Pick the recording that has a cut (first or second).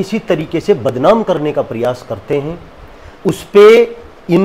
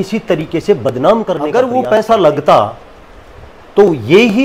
second